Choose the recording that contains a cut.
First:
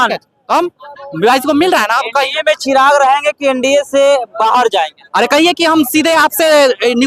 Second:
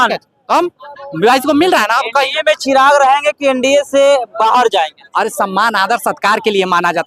first; 1 cut; at 5.0 s

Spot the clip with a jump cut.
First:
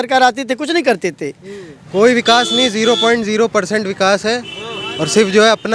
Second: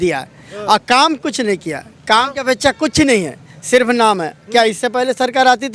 first; 1 cut; at 1.7 s

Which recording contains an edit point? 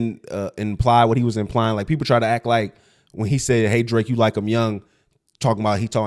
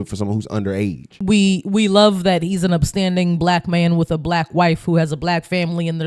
second; 1 cut; at 1.1 s

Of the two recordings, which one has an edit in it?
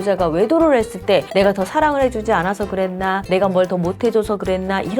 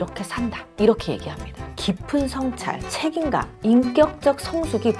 second; 1 cut; at 1.8 s

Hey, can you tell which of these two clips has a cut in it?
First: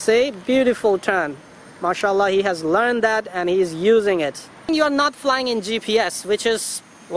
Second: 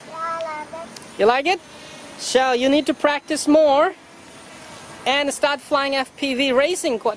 first; 1 cut; at 4.7 s

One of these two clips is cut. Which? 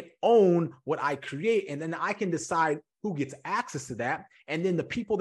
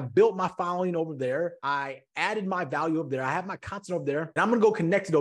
second; 2 cuts; at 1.6 s, 4.3 s

